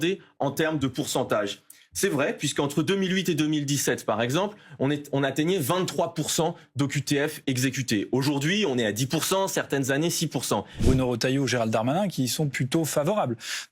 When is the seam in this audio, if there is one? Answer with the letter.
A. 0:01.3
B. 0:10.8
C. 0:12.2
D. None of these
B